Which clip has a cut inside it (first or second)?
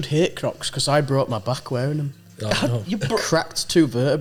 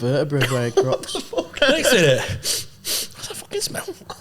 second